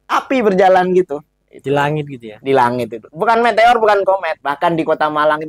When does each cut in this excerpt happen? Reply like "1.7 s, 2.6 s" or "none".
4.4 s